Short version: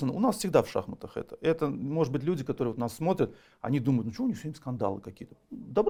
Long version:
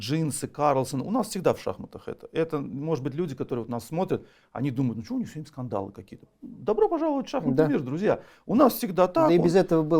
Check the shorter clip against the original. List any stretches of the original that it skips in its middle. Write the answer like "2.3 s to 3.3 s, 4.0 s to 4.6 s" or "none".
none